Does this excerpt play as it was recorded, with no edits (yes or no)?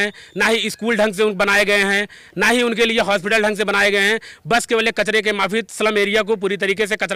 yes